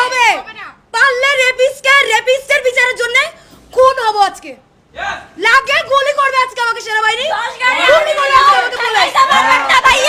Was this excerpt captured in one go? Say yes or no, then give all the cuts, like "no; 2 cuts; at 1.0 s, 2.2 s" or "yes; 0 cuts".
yes; 0 cuts